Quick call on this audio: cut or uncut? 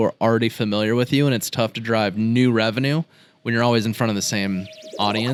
uncut